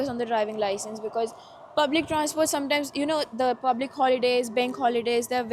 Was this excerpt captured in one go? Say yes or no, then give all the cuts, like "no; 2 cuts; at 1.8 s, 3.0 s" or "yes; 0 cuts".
yes; 0 cuts